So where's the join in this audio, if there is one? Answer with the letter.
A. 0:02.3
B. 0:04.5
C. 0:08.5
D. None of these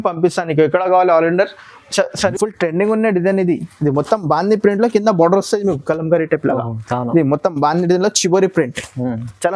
A